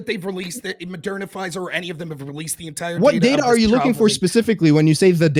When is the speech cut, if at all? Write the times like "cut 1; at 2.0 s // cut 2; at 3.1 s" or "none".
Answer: none